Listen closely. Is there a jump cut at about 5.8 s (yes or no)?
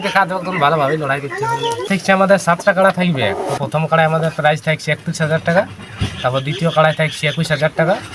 no